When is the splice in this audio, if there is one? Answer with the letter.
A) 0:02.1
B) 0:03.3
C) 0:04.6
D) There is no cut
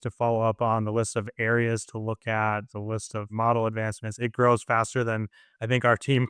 B